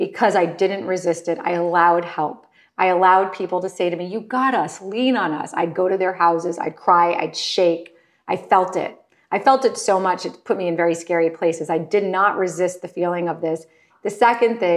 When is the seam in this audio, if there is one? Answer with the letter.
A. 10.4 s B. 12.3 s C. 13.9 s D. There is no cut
C